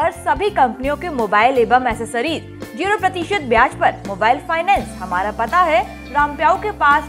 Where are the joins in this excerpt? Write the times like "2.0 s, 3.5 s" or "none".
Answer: none